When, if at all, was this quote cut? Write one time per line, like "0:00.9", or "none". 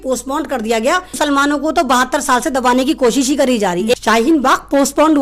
0:01.1
0:03.9